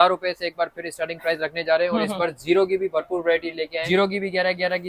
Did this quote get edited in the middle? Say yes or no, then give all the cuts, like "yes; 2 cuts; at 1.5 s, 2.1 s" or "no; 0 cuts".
no; 0 cuts